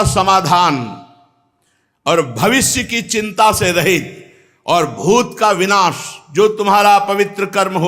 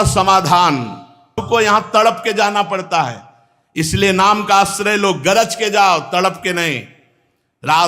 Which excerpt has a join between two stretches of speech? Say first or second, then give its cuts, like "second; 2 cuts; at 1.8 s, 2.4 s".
second; 1 cut; at 1.4 s